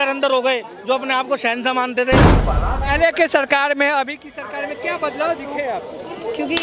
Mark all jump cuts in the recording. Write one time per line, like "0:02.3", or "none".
0:02.3